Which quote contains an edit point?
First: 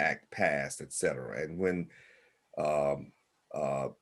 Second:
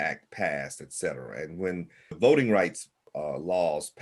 second; 2 cuts; at 2.2 s, 3.1 s

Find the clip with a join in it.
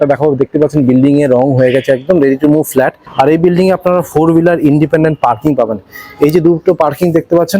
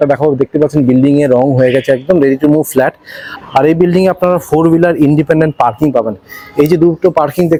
first; 1 cut; at 3.0 s

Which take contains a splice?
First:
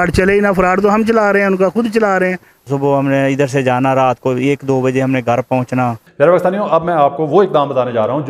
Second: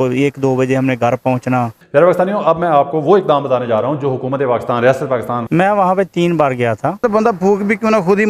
second; 2 cuts; at 5.5 s, 7.0 s

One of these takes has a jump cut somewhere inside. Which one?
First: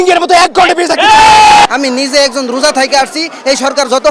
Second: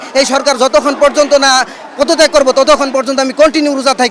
first; 1 cut; at 1.7 s

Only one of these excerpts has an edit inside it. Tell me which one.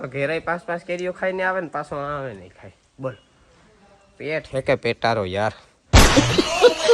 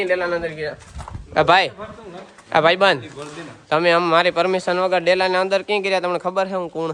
first; 2 cuts; at 3.2 s, 5.7 s

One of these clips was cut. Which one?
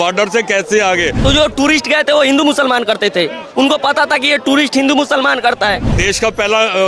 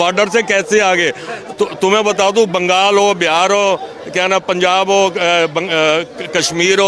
first; 2 cuts; at 1.2 s, 6.0 s

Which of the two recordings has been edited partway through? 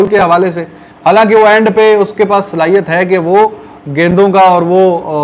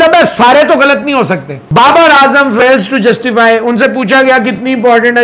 second; 1 cut; at 1.7 s

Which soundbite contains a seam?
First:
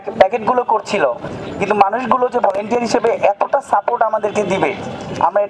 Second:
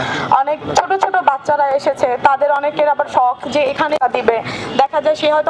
first; 1 cut; at 1.3 s

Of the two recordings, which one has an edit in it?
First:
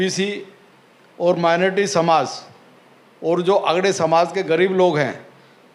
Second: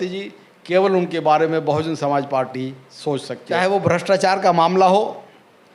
second; 1 cut; at 3.5 s

